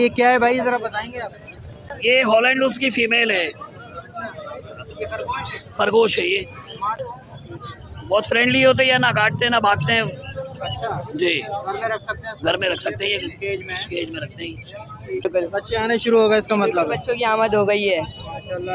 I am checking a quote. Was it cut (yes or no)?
yes